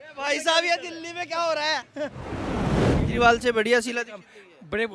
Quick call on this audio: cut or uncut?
cut